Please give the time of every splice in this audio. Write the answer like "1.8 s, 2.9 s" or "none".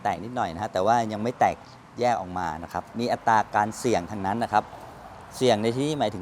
2.9 s